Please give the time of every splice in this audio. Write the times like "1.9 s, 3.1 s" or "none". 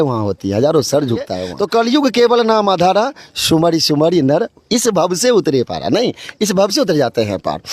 1.4 s